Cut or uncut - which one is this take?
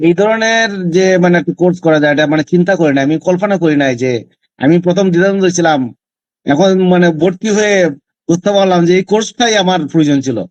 uncut